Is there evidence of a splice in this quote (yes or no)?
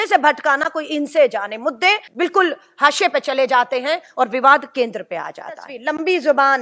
yes